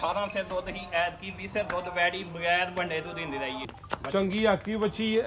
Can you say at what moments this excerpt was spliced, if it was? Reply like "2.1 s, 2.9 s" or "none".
3.7 s

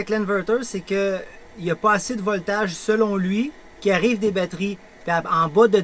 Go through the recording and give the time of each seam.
none

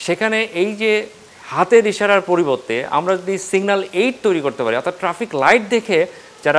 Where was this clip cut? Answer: none

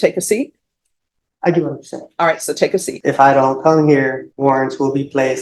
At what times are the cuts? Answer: 2.9 s, 4.3 s

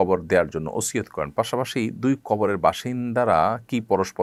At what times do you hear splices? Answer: none

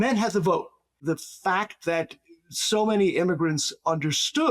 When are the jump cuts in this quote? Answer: 1.0 s

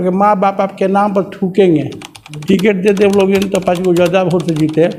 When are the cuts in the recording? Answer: 2.4 s

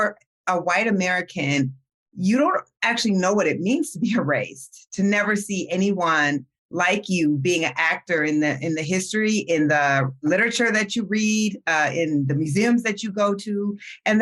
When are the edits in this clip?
10.2 s

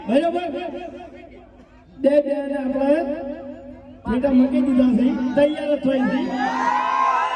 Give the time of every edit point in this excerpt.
none

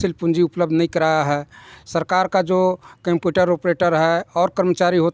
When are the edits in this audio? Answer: none

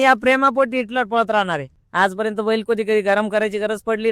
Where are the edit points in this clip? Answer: 1.8 s

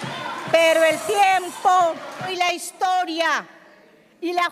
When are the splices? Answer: 2.3 s

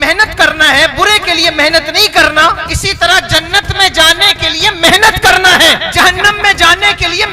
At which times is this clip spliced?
2.7 s, 5.9 s

